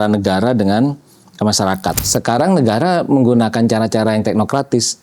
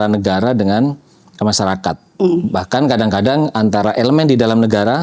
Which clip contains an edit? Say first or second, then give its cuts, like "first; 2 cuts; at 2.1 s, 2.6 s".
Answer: first; 1 cut; at 2.0 s